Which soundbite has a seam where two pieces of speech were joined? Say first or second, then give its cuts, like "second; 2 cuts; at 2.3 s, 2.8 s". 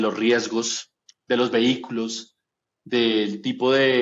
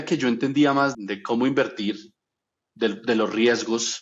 second; 1 cut; at 0.9 s